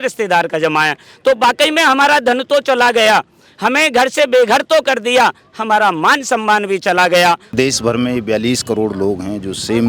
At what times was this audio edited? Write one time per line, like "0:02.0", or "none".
0:07.5